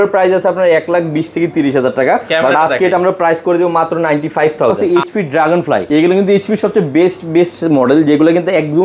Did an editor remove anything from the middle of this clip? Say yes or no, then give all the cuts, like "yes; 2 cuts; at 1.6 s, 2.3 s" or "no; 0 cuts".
yes; 2 cuts; at 4.8 s, 5.8 s